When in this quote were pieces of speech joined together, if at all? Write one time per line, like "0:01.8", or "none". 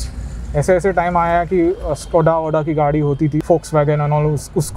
0:03.4